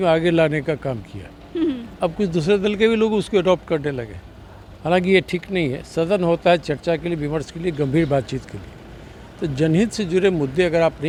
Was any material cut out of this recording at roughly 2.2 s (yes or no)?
no